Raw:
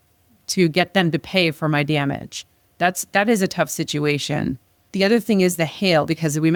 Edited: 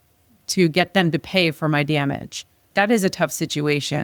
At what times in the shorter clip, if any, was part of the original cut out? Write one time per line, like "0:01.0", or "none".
0:02.6

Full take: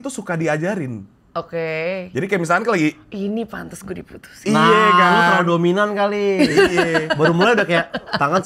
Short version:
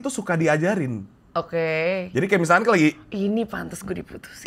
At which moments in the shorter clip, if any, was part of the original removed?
none

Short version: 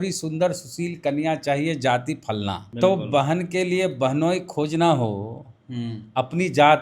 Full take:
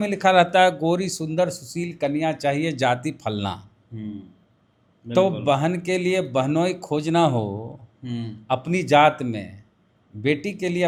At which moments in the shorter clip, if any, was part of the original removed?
0:02.7

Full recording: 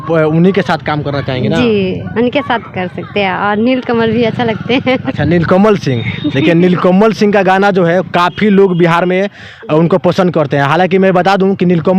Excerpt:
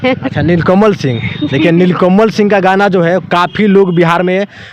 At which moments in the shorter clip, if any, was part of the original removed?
none

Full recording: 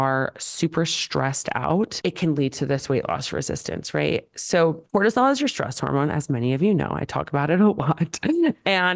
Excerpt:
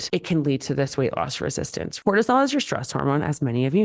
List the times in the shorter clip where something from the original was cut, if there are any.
0:01.9

